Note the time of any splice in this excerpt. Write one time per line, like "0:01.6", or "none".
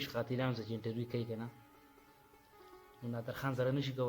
0:01.5
0:03.0